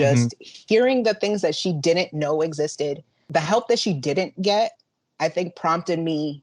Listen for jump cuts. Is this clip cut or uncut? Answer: cut